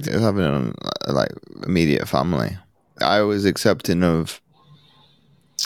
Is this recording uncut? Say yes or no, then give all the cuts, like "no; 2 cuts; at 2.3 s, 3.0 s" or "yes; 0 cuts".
yes; 0 cuts